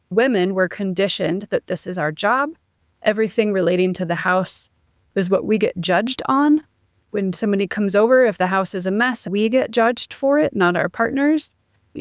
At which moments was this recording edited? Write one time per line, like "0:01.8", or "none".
none